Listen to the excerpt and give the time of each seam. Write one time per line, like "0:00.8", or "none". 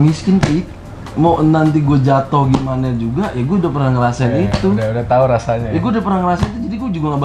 none